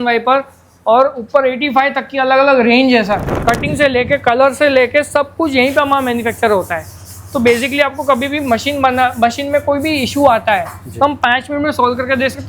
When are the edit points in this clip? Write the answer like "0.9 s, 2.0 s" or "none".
3.3 s